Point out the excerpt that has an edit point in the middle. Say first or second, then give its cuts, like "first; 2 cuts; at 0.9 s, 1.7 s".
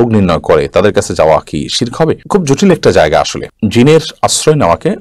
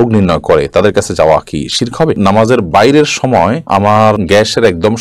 second; 2 cuts; at 2.2 s, 3.8 s